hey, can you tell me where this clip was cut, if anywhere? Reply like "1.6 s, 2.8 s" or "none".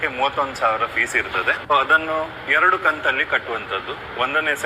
1.7 s